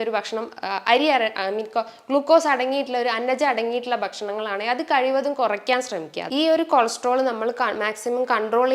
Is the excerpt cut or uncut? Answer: cut